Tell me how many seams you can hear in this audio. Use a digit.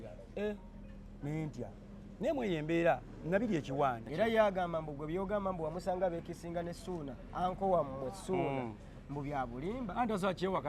1